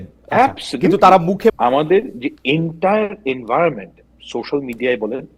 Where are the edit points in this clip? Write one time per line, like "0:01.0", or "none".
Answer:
0:01.5

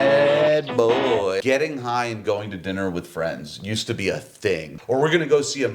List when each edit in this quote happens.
0:01.4
0:04.7

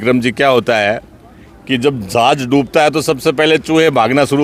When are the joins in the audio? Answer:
none

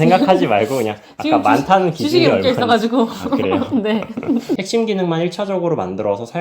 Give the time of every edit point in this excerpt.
0:04.5

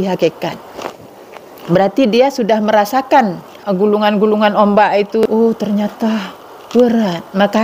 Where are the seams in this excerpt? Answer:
0:03.5
0:05.2

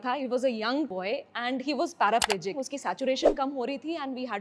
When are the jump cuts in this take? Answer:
0:00.9
0:02.7

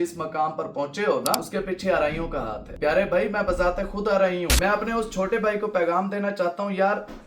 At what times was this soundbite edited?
0:01.5
0:02.6
0:04.5

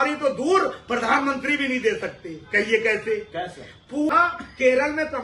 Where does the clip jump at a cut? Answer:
0:04.1

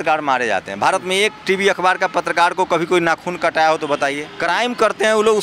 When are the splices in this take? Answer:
0:04.3

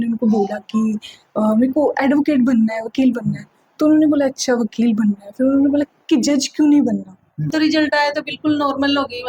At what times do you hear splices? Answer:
0:07.5

